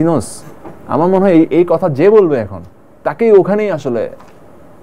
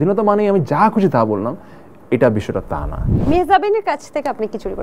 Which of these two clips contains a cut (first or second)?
second